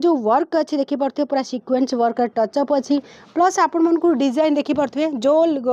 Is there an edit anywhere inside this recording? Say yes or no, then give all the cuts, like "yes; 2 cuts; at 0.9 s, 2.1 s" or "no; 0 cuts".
no; 0 cuts